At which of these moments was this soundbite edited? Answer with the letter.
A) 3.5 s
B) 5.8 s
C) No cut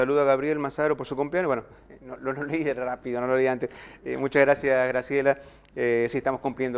A